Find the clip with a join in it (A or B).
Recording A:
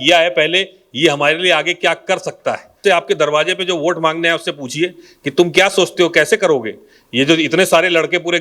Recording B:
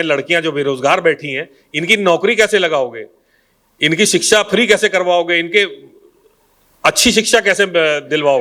A